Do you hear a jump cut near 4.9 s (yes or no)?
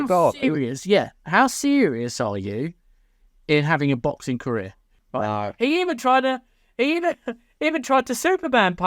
yes